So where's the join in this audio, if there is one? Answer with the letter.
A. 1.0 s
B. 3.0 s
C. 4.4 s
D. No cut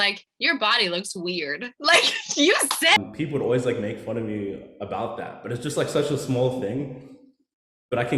B